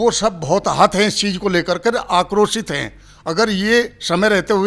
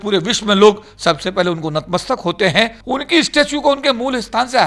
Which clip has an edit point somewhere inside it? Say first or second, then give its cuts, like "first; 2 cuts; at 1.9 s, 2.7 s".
second; 1 cut; at 2.8 s